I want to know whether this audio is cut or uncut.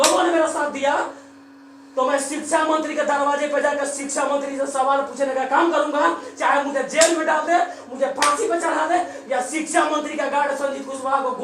uncut